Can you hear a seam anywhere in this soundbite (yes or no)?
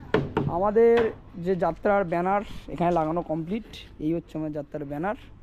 no